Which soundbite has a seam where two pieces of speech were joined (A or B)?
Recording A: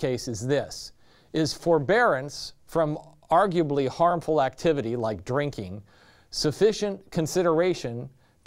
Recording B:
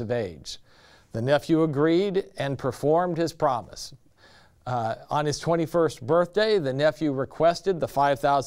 A